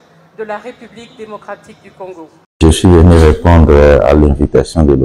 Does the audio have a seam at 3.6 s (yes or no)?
no